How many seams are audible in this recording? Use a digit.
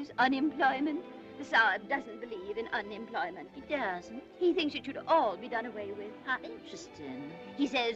1